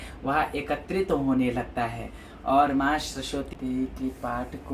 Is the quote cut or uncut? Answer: cut